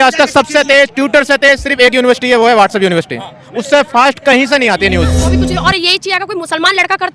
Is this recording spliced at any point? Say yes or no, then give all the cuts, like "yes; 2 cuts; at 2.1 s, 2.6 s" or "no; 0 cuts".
yes; 1 cut; at 5.3 s